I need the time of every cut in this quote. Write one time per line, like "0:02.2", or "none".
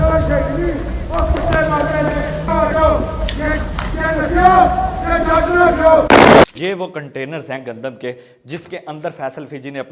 none